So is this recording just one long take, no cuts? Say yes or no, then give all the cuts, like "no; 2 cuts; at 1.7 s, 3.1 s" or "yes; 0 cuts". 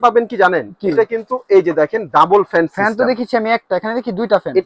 yes; 0 cuts